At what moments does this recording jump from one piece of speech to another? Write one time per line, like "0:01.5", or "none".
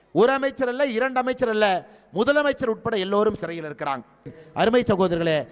0:04.4